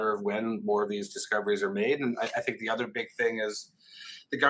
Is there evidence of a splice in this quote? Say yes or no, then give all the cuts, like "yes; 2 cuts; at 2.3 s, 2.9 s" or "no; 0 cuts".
no; 0 cuts